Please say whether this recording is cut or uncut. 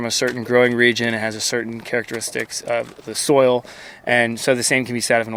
uncut